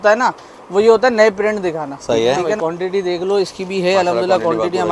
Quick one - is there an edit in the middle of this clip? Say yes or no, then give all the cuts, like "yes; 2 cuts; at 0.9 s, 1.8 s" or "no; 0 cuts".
yes; 1 cut; at 2.5 s